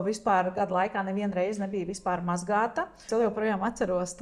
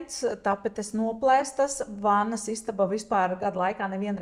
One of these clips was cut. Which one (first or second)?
first